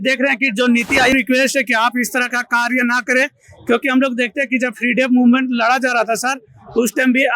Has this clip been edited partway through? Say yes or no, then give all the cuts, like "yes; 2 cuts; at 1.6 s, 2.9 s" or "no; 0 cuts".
yes; 1 cut; at 1.1 s